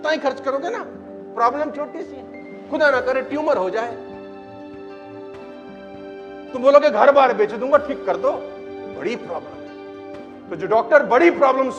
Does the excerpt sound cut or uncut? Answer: uncut